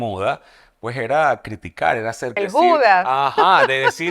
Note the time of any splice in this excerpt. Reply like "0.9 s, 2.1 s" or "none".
2.3 s